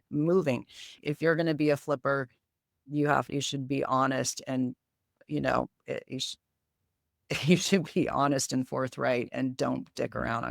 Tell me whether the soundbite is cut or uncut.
cut